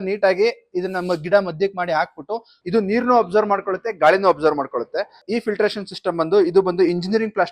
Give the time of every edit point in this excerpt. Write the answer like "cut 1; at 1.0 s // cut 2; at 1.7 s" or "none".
cut 1; at 2.5 s // cut 2; at 5.2 s